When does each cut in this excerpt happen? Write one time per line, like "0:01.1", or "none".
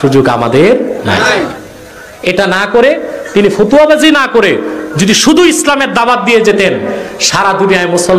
none

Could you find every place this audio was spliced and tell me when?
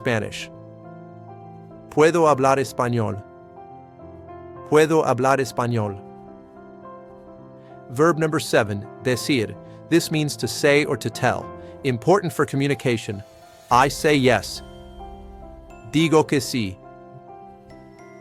none

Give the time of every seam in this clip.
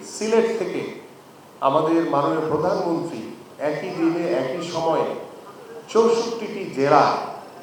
none

